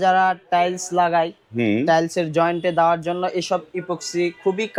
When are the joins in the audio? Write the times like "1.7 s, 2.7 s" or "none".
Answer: none